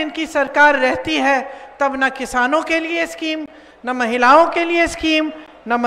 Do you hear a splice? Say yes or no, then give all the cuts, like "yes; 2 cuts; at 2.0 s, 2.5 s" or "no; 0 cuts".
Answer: no; 0 cuts